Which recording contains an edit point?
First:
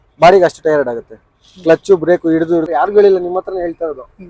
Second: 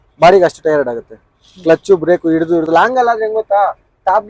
first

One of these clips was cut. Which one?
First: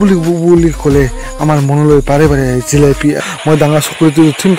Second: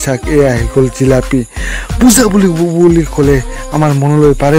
first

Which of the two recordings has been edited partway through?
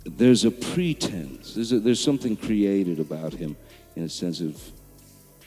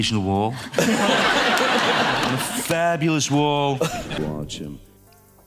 second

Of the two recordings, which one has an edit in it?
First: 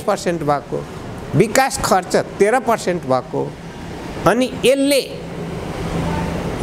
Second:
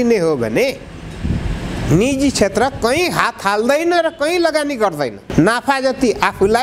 second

